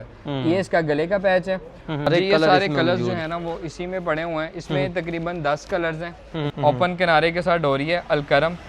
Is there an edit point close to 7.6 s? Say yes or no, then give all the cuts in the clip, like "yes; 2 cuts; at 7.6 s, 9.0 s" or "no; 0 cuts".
no; 2 cuts; at 2.1 s, 6.4 s